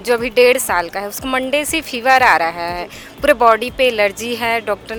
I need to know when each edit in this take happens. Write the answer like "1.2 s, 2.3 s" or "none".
none